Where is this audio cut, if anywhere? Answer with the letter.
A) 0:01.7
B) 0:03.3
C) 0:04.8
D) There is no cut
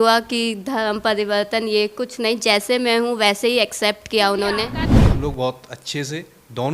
C